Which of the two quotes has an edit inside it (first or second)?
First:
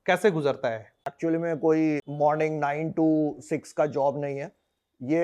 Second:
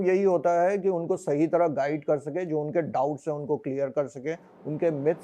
first